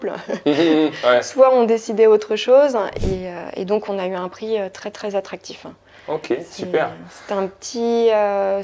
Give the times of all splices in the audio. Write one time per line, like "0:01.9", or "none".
0:03.0